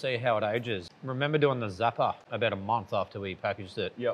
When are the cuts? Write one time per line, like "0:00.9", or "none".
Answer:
0:00.8
0:02.2